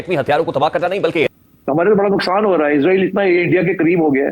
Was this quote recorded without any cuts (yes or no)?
no